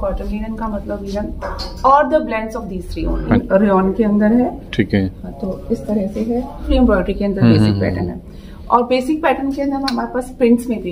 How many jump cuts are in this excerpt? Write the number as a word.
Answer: two